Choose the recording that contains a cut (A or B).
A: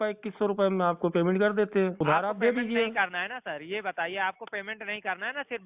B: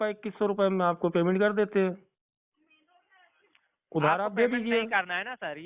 A